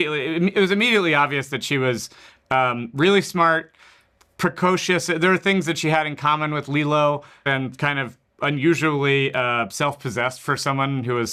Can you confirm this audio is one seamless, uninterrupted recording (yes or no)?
yes